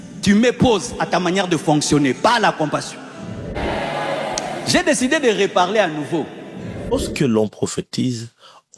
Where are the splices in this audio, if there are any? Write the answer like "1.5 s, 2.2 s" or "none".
3.5 s, 6.9 s